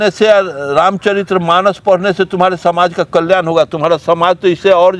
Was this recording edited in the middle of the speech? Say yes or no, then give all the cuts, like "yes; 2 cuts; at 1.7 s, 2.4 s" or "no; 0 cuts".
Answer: no; 0 cuts